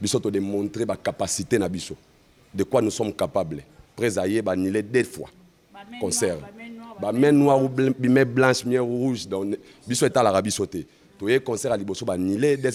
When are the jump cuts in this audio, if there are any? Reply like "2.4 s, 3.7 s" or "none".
none